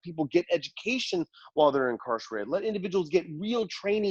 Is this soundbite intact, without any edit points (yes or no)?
yes